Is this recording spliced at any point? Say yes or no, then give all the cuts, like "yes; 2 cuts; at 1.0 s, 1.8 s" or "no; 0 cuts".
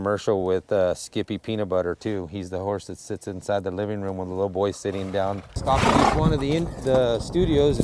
yes; 1 cut; at 5.5 s